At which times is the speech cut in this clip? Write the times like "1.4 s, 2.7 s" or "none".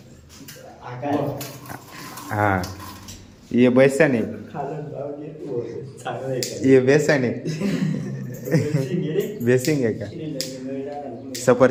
none